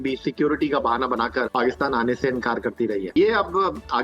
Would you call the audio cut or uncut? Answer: cut